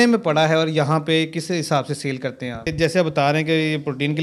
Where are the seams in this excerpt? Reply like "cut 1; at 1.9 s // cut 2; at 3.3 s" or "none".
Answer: cut 1; at 2.7 s